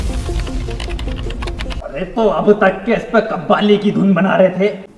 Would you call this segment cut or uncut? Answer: uncut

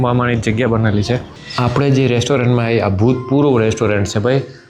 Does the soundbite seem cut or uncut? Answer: cut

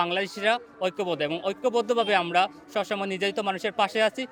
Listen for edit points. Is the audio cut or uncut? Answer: uncut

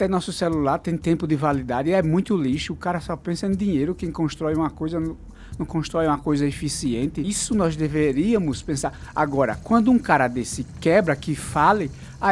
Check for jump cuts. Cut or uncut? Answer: cut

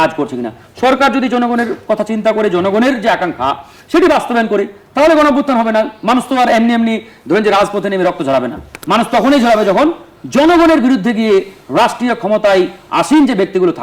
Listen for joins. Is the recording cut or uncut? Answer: uncut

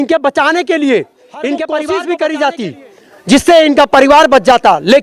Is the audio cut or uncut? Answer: cut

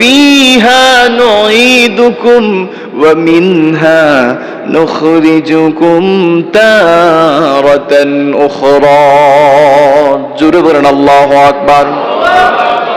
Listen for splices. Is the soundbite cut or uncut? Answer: uncut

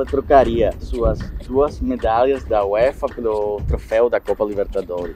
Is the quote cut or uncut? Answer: uncut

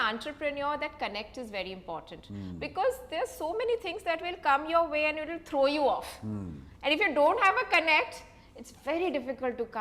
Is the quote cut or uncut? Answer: uncut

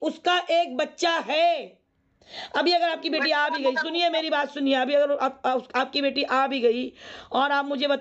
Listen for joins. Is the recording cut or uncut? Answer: uncut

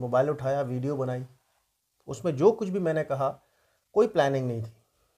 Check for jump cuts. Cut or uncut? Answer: uncut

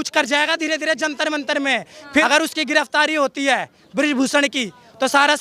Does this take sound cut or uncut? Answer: cut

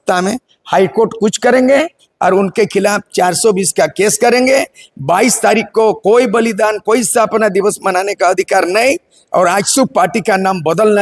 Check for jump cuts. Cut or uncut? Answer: uncut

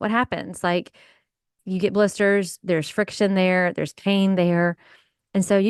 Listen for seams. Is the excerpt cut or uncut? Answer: uncut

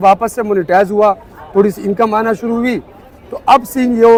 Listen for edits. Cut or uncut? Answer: uncut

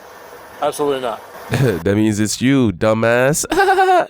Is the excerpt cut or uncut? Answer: cut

